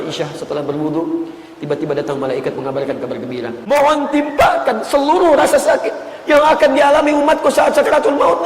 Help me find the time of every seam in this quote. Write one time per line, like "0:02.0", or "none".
0:03.5